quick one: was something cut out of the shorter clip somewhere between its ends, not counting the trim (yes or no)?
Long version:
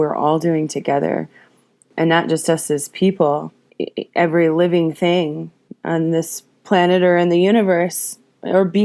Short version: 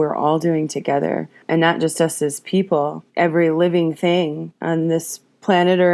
yes